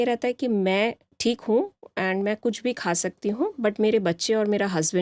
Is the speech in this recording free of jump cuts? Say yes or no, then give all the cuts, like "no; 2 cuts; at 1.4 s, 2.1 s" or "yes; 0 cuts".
yes; 0 cuts